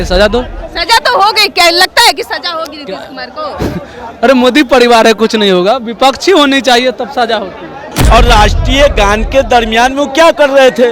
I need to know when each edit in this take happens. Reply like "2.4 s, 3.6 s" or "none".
7.8 s